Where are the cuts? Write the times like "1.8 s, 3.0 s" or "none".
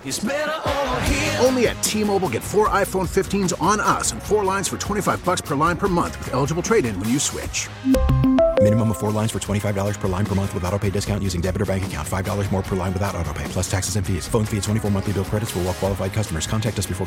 none